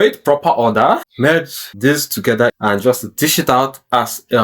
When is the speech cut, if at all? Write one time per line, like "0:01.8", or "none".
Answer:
0:01.2
0:02.5